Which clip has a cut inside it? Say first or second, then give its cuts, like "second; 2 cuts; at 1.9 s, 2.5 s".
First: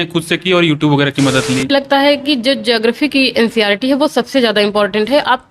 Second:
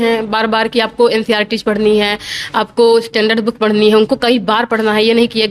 first; 1 cut; at 1.7 s